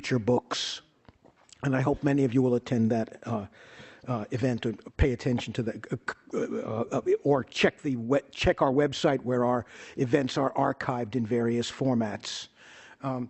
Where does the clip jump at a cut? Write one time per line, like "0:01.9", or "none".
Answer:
0:01.5